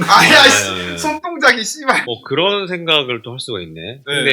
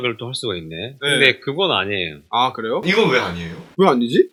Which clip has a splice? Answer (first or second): first